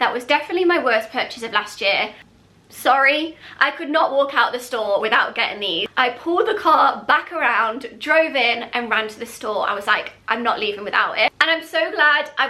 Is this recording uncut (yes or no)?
no